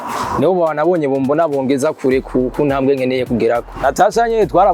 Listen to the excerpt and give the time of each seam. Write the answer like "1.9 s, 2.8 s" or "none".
3.8 s